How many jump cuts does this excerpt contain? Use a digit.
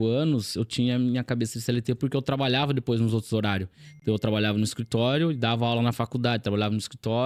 0